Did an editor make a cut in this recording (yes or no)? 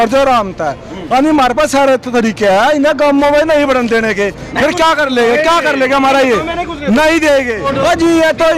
yes